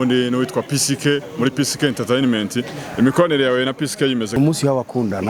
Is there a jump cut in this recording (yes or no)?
yes